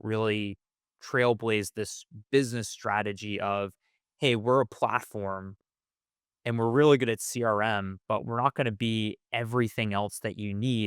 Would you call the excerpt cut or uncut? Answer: uncut